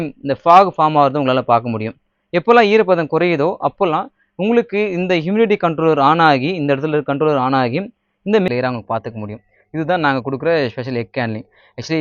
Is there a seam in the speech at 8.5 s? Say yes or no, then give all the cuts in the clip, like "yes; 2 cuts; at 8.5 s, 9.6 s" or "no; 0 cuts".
yes; 1 cut; at 8.5 s